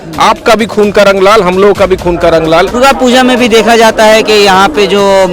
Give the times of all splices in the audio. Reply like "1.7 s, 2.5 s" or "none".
2.7 s